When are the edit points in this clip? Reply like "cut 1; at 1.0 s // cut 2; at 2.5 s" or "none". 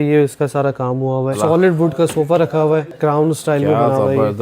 cut 1; at 1.4 s // cut 2; at 2.9 s